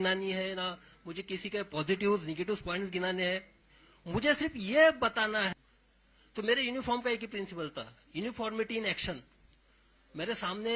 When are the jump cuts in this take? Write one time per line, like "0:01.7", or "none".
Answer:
0:05.5